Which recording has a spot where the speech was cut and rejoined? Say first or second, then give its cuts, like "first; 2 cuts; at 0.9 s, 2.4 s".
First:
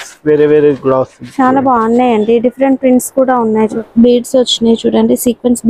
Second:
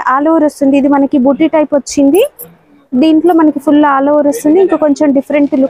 first; 1 cut; at 3.8 s